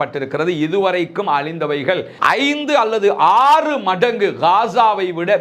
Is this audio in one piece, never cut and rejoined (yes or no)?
no